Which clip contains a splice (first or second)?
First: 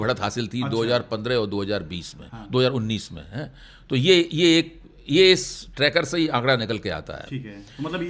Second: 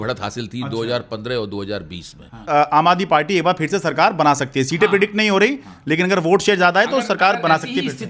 second